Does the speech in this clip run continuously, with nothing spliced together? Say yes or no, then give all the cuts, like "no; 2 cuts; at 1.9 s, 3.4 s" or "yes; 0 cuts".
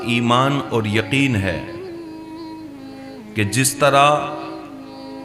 no; 2 cuts; at 1.6 s, 3.3 s